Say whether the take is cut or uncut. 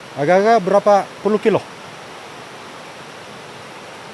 uncut